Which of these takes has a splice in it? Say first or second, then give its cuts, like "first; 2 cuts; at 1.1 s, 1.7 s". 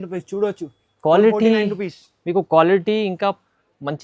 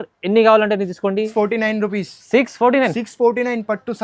second; 1 cut; at 1.3 s